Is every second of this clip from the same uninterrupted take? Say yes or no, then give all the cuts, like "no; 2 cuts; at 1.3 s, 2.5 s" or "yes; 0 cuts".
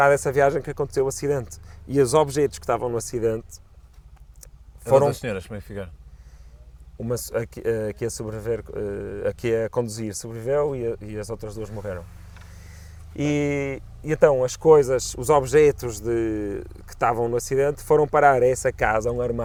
yes; 0 cuts